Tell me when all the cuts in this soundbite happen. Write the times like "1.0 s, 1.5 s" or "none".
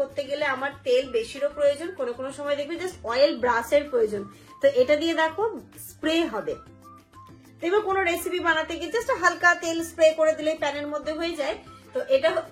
none

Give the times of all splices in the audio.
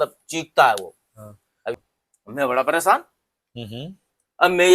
1.8 s

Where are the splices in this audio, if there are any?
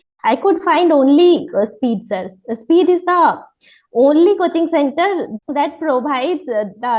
5.4 s

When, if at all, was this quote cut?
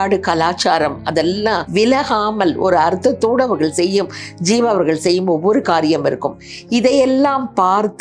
1.7 s

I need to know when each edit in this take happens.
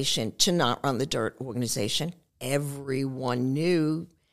2.3 s

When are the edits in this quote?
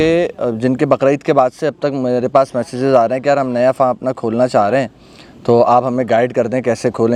none

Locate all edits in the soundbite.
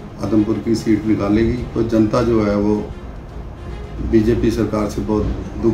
1.6 s

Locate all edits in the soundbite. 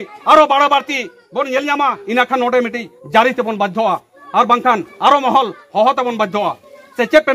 none

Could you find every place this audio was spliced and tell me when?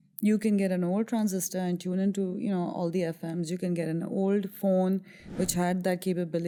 none

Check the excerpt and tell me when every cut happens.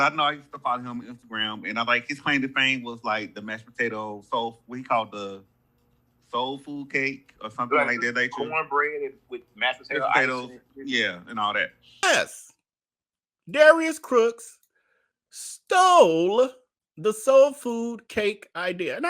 12.0 s

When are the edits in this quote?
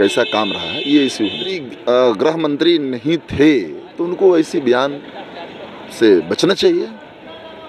1.6 s

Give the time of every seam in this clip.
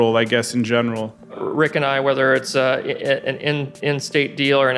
1.3 s

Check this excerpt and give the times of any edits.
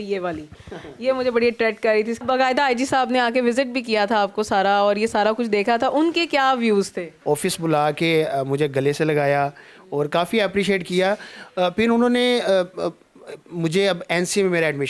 2.2 s, 7.1 s

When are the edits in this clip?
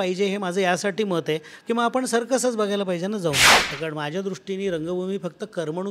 3.7 s

